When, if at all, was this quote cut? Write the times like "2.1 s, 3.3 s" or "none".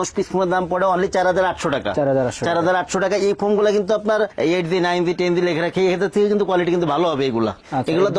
none